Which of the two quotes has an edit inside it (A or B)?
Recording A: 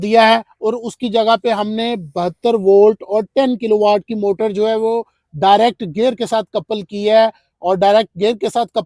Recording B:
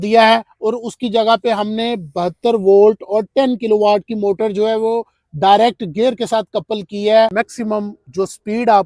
B